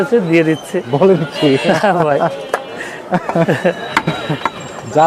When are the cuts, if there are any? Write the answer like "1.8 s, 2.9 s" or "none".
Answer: none